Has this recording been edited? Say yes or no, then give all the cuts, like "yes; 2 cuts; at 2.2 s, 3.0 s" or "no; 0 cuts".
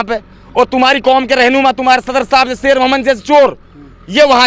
no; 0 cuts